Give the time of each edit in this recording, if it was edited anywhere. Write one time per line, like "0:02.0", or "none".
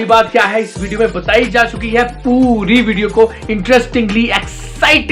none